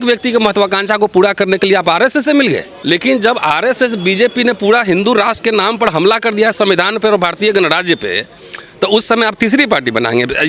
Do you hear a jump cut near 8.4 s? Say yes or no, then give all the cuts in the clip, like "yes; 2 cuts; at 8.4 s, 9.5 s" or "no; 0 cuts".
no; 1 cut; at 2.7 s